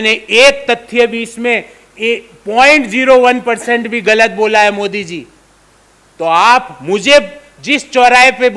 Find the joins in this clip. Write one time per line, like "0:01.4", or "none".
none